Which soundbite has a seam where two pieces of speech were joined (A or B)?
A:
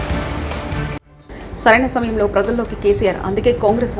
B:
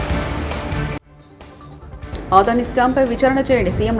B